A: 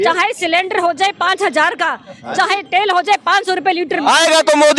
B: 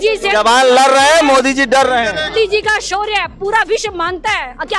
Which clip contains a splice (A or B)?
B